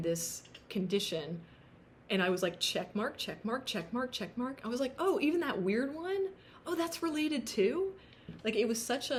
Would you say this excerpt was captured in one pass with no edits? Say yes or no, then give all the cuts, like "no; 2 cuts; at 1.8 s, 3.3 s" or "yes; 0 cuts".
yes; 0 cuts